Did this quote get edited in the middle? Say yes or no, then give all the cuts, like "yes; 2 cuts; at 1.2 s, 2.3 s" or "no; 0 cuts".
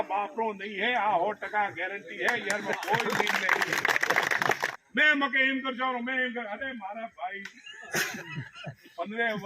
yes; 1 cut; at 4.6 s